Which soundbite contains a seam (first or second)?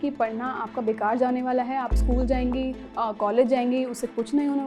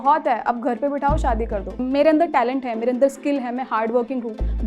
second